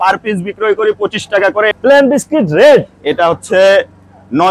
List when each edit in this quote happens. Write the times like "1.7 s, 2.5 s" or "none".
1.7 s